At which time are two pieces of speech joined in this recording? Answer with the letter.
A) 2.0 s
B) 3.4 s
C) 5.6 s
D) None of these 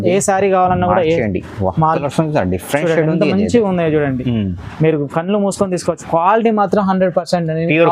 A